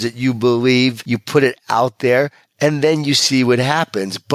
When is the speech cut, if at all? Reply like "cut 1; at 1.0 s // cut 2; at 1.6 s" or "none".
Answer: none